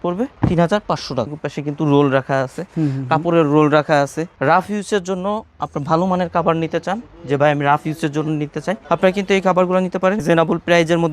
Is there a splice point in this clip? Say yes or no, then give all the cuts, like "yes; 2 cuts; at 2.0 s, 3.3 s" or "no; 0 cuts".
yes; 3 cuts; at 1.4 s, 4.2 s, 10.2 s